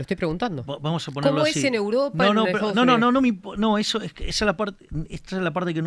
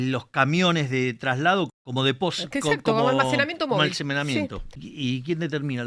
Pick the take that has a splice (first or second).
second